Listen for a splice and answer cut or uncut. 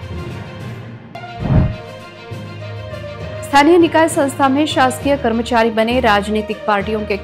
cut